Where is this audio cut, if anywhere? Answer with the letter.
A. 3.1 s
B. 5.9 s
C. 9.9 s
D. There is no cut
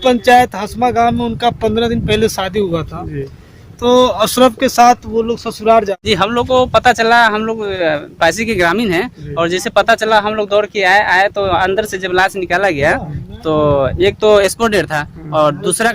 B